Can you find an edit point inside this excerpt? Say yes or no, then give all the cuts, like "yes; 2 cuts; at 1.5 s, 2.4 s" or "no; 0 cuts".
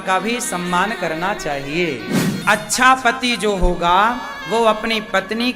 yes; 1 cut; at 2.3 s